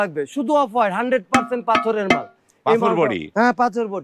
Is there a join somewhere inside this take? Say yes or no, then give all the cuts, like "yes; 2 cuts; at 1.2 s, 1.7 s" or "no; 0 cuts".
no; 0 cuts